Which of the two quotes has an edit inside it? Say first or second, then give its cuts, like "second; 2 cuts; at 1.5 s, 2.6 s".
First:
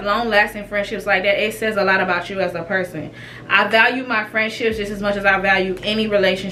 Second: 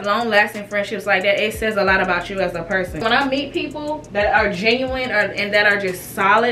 second; 1 cut; at 3.0 s